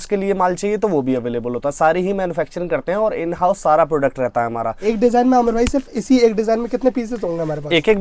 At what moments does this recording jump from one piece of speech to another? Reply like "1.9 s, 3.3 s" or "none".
4.7 s